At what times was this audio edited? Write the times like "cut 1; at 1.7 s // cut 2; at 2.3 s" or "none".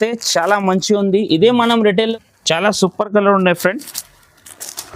cut 1; at 2.1 s